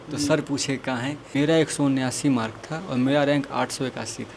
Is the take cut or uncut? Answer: cut